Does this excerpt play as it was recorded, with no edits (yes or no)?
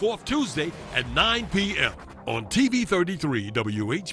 yes